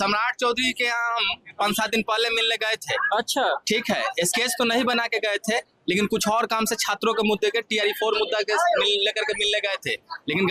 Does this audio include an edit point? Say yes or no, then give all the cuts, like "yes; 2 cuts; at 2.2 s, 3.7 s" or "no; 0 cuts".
no; 0 cuts